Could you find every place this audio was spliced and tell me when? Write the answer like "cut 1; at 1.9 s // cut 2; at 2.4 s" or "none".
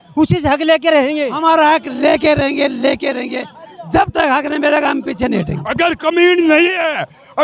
cut 1; at 1.3 s // cut 2; at 5.6 s

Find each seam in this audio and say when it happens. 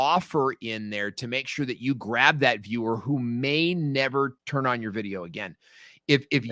cut 1; at 4.4 s

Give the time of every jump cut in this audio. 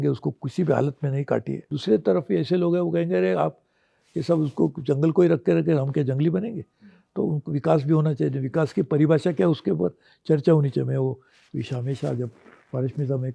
cut 1; at 1.6 s

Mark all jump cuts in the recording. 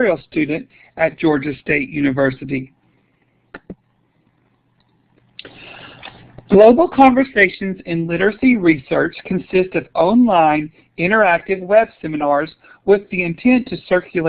none

